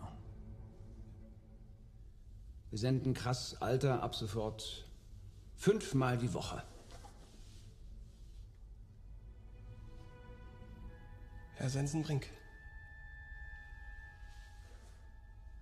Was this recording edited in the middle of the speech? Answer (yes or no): no